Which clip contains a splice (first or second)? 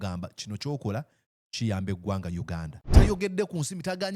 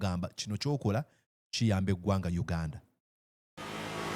first